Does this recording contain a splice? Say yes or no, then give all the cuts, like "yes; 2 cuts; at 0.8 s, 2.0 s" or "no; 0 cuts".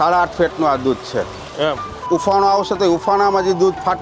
yes; 1 cut; at 2.0 s